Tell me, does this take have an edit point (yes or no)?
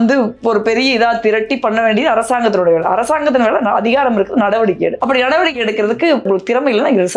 no